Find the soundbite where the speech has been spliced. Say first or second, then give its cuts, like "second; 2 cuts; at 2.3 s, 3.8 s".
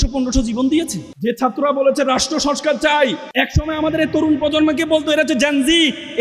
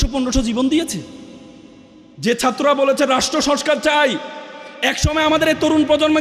first; 2 cuts; at 1.0 s, 3.2 s